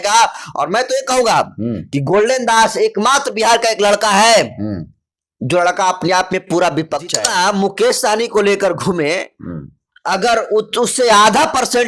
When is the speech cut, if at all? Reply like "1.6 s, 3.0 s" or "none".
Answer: 7.2 s

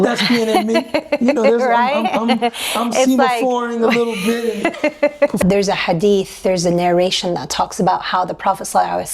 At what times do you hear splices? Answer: 5.4 s

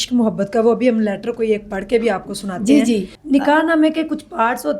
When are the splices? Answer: 3.1 s

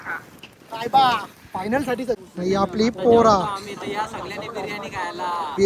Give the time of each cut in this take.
2.2 s

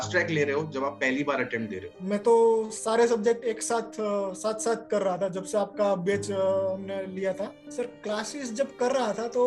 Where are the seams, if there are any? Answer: 2.0 s, 7.6 s

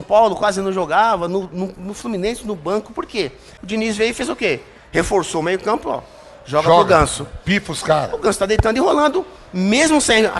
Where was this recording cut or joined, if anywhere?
3.5 s

